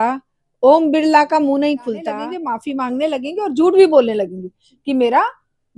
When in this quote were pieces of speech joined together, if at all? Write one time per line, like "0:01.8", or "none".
0:02.3